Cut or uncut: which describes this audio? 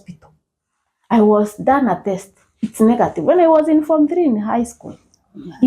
uncut